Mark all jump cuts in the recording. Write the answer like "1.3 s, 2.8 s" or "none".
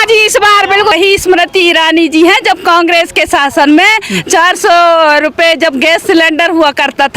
0.9 s